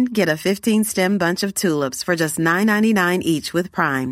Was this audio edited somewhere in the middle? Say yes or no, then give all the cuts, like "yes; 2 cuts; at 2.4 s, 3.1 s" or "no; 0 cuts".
no; 0 cuts